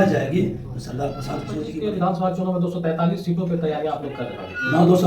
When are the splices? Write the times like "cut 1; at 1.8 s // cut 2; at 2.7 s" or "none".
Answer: cut 1; at 1.7 s